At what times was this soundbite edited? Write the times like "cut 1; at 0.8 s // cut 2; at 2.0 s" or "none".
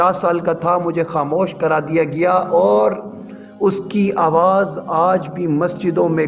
none

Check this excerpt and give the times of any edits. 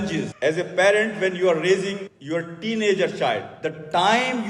cut 1; at 3.5 s

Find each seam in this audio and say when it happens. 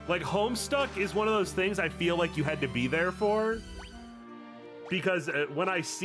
none

